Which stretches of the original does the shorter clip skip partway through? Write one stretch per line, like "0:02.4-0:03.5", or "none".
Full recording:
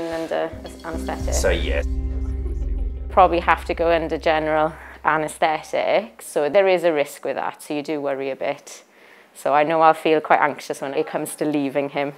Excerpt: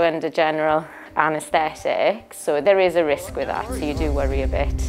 none